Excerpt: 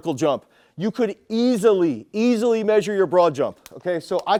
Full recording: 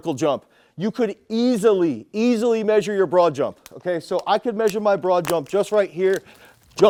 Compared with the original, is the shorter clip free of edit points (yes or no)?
yes